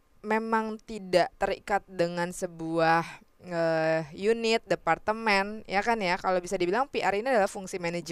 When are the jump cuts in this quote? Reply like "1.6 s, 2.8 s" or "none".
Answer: none